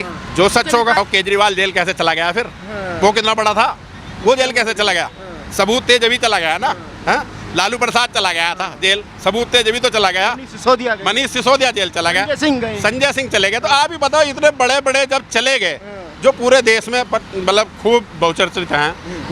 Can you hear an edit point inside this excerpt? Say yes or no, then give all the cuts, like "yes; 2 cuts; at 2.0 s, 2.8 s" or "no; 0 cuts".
yes; 1 cut; at 1.0 s